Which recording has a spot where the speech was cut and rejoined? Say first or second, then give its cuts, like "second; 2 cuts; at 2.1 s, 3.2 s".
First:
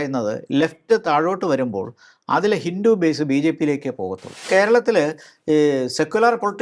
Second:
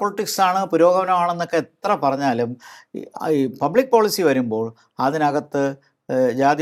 first; 1 cut; at 4.5 s